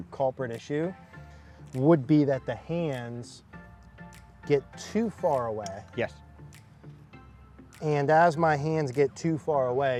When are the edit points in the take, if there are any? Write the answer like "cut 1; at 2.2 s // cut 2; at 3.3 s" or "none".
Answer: none